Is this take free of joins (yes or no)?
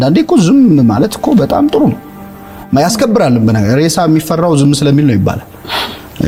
yes